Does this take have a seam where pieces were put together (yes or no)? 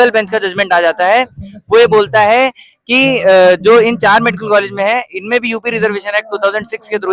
no